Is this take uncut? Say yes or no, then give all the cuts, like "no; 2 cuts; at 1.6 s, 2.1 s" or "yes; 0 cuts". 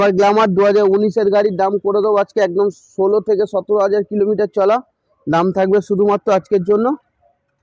yes; 0 cuts